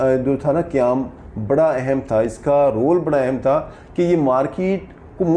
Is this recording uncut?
yes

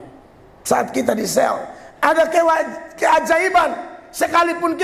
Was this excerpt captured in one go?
yes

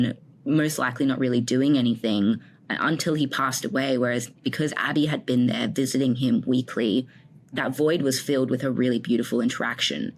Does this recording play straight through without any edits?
no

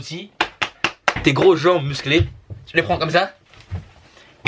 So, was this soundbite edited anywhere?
no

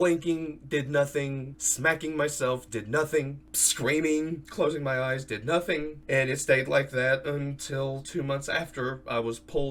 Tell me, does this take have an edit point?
no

